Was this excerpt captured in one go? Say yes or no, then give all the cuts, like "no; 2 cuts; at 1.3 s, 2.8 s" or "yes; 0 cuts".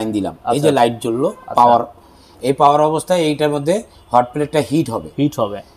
yes; 0 cuts